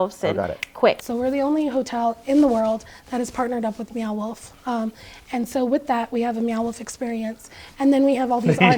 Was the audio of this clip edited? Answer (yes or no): yes